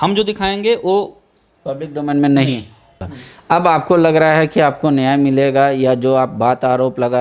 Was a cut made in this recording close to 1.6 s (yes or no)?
no